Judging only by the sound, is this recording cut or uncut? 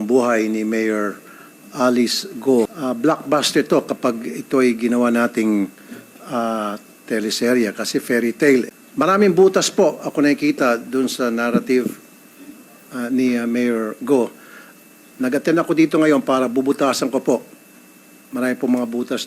cut